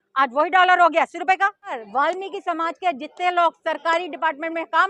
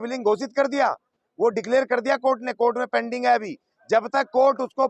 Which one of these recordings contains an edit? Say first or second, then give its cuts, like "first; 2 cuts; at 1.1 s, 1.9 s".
first; 1 cut; at 1.8 s